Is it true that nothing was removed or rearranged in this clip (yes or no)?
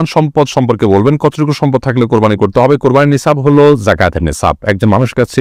yes